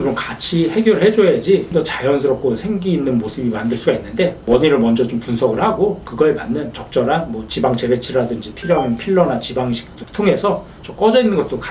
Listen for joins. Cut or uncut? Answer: uncut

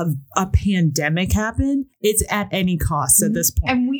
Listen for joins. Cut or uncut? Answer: cut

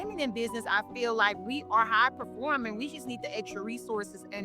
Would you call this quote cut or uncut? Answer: uncut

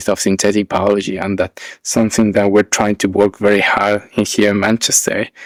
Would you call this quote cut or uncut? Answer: uncut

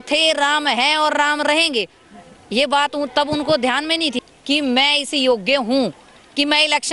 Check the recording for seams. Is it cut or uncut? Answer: cut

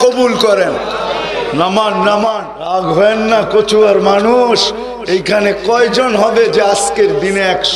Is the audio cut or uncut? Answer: cut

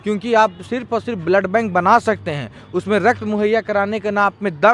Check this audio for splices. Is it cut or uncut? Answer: uncut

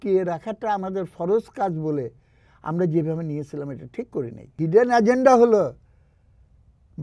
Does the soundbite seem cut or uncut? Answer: cut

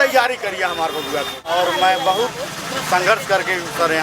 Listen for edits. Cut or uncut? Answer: cut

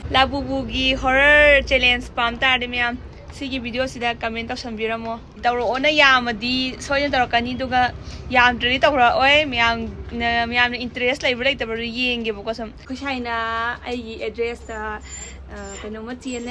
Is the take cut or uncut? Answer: cut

